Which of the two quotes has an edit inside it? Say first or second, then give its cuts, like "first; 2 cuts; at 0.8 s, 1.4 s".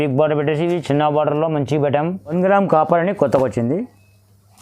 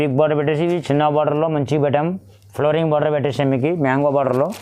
first; 1 cut; at 2.3 s